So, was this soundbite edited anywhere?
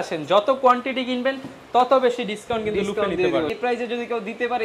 yes; 1 cut; at 3.5 s

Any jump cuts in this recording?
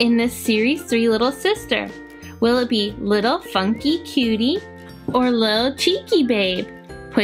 no; 0 cuts

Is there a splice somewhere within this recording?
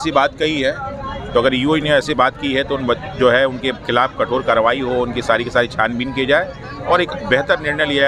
no; 0 cuts

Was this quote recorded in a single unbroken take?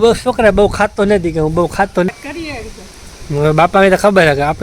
no; 1 cut; at 2.1 s

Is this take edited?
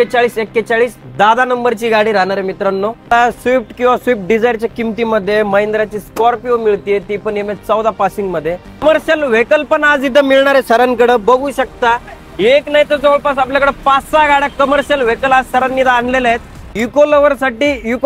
yes; 3 cuts; at 3.1 s, 8.8 s, 16.7 s

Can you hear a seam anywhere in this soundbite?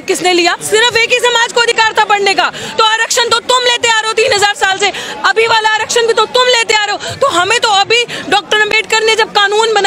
no; 0 cuts

